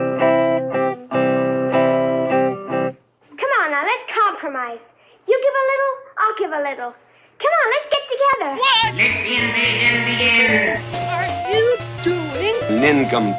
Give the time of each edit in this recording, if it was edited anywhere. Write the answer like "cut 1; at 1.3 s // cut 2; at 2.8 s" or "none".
cut 1; at 7.1 s